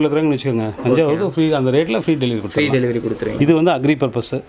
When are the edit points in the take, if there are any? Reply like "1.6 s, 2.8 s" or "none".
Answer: 3.3 s